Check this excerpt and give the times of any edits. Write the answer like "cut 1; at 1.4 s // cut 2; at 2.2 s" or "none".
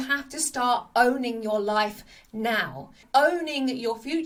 none